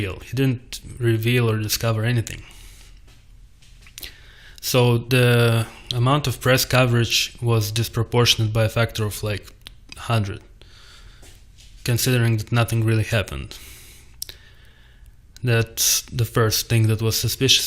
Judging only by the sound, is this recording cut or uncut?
cut